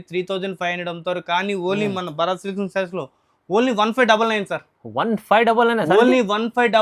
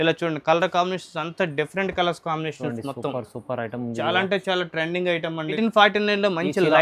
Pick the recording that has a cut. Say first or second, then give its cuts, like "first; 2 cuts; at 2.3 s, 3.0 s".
second; 1 cut; at 5.6 s